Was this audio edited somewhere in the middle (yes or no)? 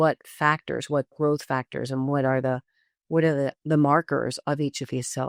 no